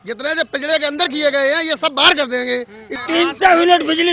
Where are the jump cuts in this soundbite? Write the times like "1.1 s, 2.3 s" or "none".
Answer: 2.9 s